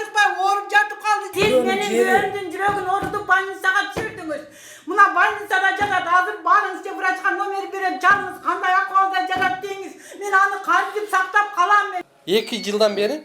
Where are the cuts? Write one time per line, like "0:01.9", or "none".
0:01.3
0:12.0

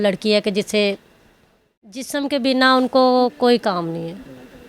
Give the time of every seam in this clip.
0:02.1

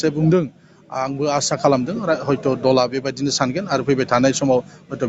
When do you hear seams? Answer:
none

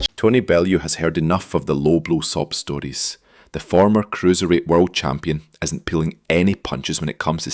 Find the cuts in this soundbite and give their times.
0:05.4

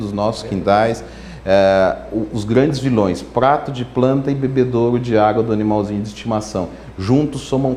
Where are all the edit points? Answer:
none

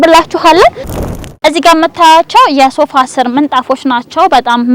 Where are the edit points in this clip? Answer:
0:01.0

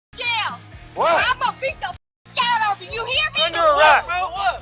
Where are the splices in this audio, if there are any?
0:03.5

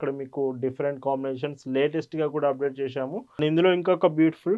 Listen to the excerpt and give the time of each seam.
0:03.4

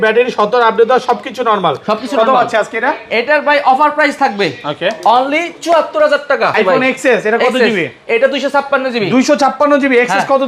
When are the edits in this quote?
0:06.5

